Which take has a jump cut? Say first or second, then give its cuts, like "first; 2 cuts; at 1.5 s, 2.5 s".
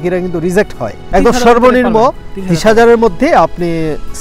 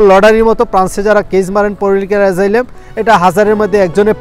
first; 1 cut; at 1.0 s